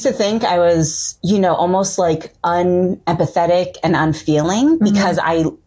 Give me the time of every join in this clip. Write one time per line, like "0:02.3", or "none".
0:01.1